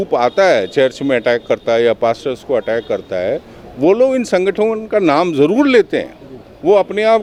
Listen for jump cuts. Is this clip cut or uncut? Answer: uncut